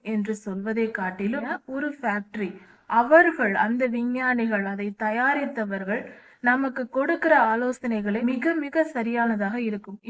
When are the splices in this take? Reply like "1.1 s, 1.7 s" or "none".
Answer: 1.6 s, 8.2 s